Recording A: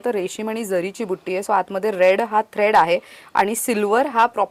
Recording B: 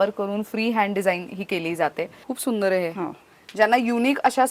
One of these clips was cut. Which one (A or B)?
B